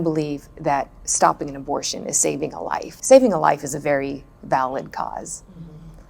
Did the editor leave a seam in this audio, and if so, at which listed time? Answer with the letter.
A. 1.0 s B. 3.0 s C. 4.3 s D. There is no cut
B